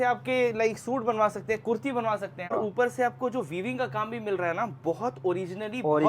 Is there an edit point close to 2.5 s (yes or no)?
yes